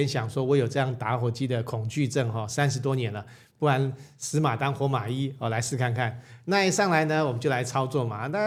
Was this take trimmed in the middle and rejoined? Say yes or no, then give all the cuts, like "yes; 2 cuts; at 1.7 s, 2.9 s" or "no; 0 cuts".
no; 0 cuts